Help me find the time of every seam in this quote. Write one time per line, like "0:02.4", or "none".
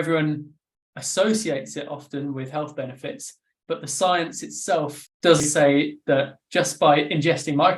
0:05.5